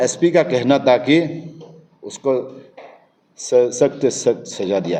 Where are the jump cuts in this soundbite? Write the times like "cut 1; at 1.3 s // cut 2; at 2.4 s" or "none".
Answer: none